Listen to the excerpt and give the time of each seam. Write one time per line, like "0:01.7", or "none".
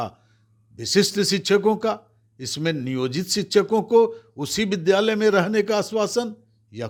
none